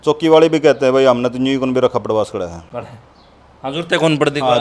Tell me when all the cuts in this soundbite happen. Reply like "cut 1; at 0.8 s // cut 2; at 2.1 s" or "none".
none